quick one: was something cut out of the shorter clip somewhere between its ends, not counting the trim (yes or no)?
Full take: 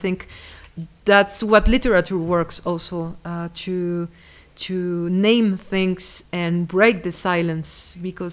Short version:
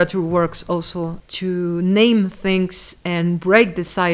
yes